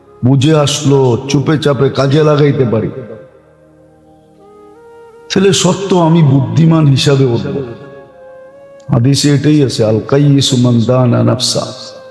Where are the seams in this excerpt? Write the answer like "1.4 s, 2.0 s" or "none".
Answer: none